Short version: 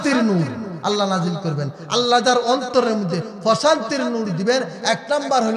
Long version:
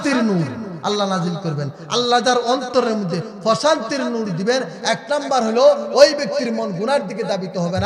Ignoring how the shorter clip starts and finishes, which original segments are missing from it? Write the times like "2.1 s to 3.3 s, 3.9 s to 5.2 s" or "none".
none